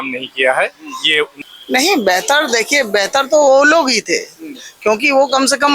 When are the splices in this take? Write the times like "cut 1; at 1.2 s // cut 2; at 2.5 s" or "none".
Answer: cut 1; at 1.4 s